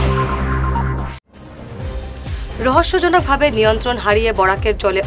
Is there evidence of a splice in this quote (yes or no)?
yes